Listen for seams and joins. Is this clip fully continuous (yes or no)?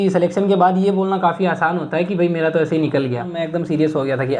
no